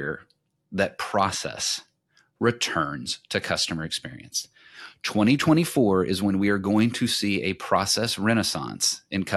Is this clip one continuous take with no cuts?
yes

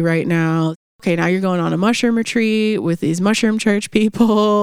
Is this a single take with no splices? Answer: no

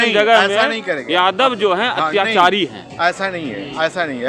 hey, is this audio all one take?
yes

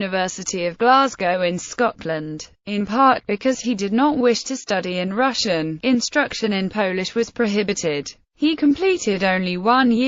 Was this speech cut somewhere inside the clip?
no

